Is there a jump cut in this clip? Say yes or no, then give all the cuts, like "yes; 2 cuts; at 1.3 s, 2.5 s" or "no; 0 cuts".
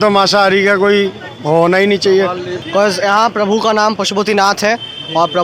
yes; 1 cut; at 2.5 s